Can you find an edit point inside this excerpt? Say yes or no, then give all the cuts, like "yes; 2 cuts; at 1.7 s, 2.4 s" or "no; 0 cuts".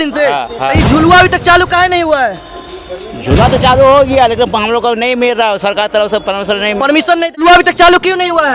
yes; 1 cut; at 7.4 s